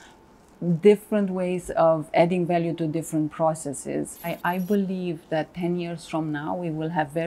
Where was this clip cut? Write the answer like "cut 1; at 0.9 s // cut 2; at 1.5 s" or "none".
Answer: cut 1; at 4.2 s